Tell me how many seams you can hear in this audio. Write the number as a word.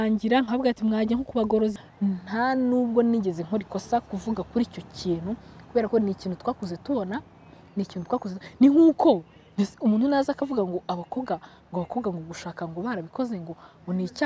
one